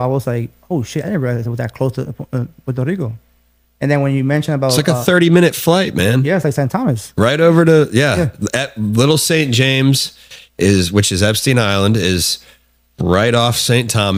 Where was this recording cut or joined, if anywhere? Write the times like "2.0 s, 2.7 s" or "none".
none